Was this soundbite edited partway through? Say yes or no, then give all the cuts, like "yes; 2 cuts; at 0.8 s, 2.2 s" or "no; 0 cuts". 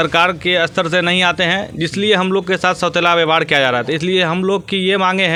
no; 0 cuts